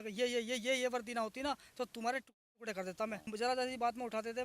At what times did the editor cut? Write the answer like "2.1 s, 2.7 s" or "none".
3.2 s